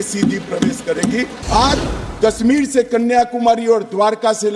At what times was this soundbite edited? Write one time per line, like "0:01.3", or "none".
0:01.3